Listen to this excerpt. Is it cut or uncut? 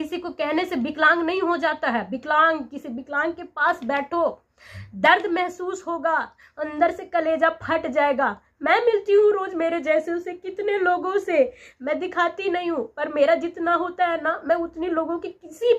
uncut